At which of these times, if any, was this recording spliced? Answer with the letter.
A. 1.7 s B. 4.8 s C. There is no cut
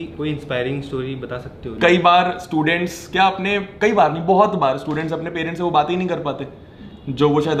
A